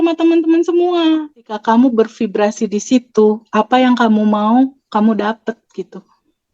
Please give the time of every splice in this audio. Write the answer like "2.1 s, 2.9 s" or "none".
1.5 s